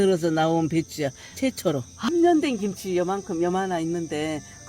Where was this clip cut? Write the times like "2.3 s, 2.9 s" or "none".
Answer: 1.9 s